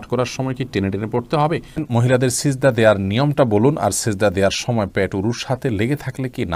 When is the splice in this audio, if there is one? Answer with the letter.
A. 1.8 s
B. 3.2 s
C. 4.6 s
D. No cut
A